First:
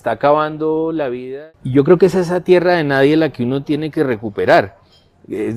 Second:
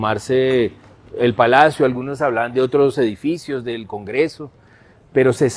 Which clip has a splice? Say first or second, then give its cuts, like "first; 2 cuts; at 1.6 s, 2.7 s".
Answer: first; 1 cut; at 1.2 s